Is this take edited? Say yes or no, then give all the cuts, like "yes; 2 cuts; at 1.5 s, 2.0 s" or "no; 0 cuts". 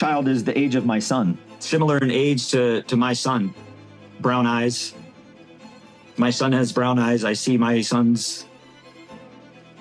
no; 0 cuts